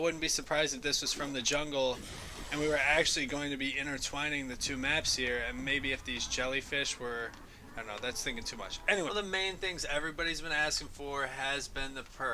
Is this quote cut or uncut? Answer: cut